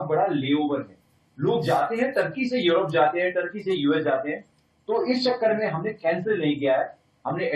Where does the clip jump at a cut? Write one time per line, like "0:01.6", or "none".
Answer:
none